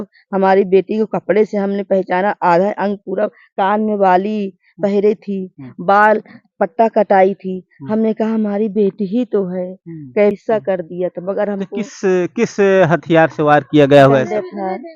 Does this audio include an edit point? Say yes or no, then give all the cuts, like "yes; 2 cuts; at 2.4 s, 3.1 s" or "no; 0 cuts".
yes; 1 cut; at 10.3 s